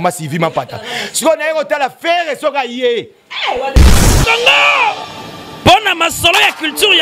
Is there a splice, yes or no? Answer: yes